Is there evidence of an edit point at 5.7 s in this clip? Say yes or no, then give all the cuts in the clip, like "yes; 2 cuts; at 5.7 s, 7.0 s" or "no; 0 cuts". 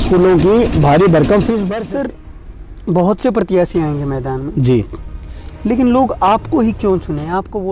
no; 1 cut; at 1.7 s